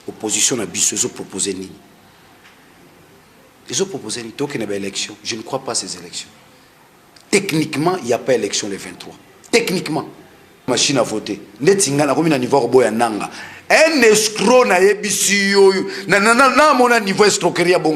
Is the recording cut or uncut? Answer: cut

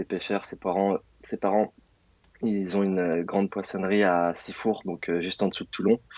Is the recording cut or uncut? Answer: uncut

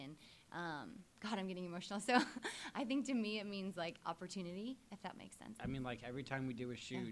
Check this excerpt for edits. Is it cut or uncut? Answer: cut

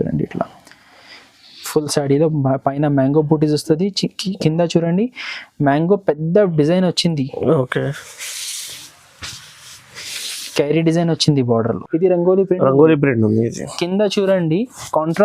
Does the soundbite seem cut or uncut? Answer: cut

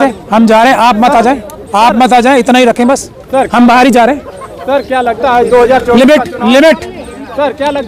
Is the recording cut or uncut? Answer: uncut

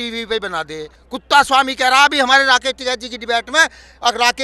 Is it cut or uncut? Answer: cut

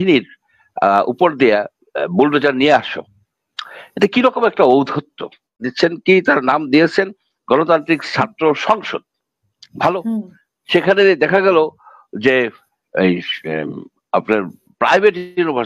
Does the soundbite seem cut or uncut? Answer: cut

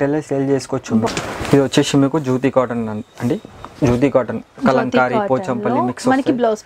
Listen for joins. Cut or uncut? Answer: cut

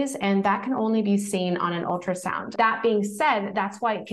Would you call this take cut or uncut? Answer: cut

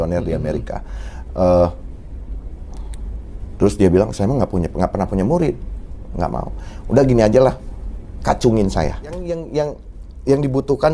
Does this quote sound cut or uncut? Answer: cut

